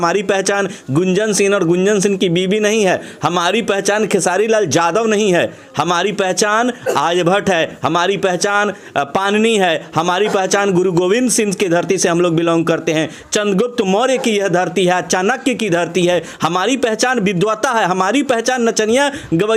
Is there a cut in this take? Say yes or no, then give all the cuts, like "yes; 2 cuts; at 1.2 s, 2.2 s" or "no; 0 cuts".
no; 0 cuts